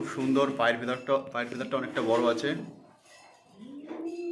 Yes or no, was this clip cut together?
no